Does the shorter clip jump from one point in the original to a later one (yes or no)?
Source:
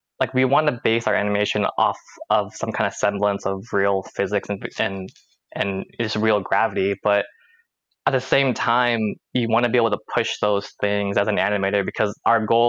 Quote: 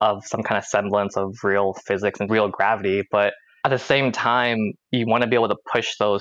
yes